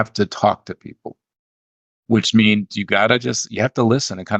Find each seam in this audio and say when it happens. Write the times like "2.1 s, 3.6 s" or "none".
none